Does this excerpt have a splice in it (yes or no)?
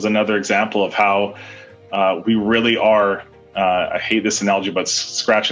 no